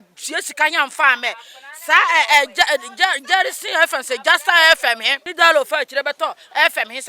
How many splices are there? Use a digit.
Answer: 1